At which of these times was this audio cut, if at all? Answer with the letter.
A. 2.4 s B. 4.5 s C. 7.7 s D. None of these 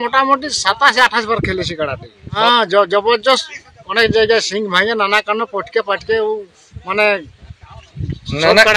A